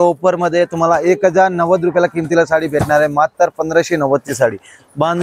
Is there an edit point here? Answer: no; 0 cuts

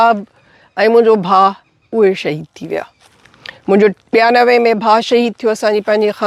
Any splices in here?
no; 0 cuts

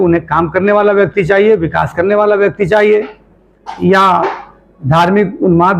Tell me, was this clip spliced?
no; 0 cuts

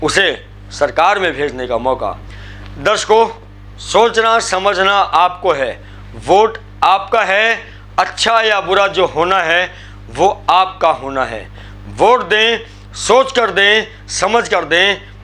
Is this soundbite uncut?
no; 1 cut; at 2.3 s

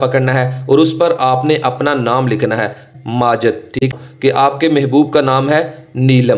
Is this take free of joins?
no; 2 cuts; at 2.9 s, 3.9 s

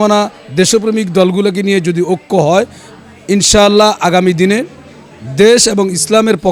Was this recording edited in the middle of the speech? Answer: no; 0 cuts

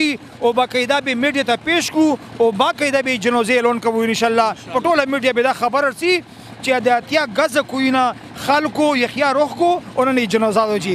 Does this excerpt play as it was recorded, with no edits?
yes; 0 cuts

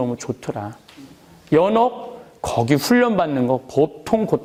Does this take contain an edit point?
no; 0 cuts

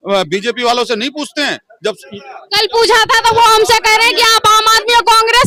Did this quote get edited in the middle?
no; 0 cuts

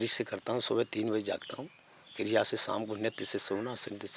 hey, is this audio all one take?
yes; 0 cuts

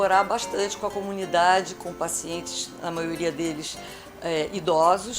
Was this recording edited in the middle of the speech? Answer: no; 0 cuts

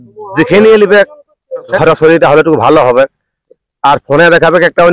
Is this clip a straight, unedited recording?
no; 1 cut; at 1.7 s

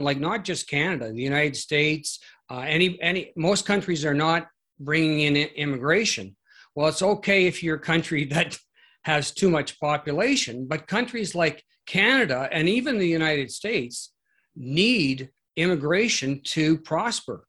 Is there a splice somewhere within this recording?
no; 0 cuts

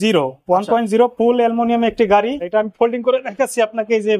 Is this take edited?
yes; 1 cut; at 2.4 s

